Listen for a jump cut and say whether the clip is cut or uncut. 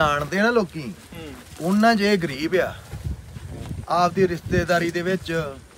uncut